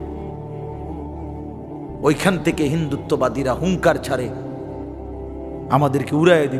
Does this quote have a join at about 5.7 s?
yes; 2 cuts; at 4.3 s, 5.7 s

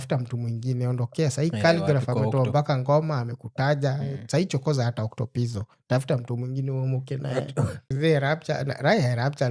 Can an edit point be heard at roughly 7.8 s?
yes; 1 cut; at 7.8 s

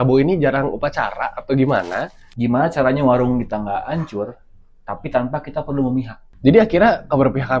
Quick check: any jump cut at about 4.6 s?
no; 2 cuts; at 2.2 s, 6.2 s

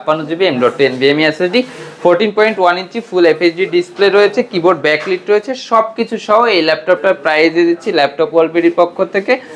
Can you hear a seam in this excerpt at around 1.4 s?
no; 0 cuts

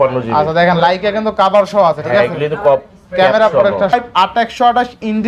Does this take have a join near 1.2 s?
no; 1 cut; at 3.9 s

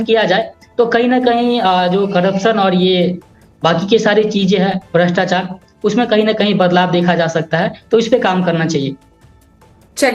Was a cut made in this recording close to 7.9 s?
no; 0 cuts

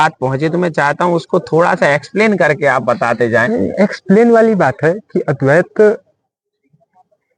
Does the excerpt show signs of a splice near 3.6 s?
no; 0 cuts

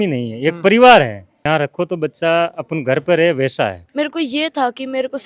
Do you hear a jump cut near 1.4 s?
no; 1 cut; at 3.8 s

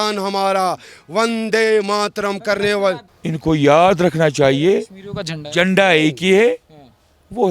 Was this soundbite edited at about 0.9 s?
no; 1 cut; at 3.1 s

